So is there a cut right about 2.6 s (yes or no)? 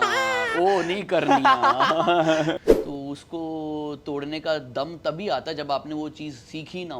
yes